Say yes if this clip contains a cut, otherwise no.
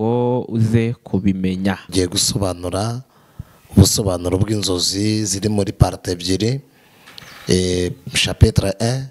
yes